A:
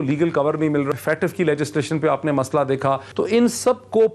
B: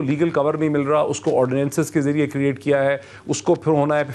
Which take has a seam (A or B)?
A